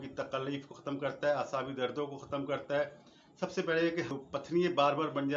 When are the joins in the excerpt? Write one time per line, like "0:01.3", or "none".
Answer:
0:04.1